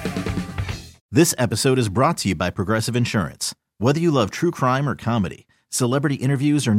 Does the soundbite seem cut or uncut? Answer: cut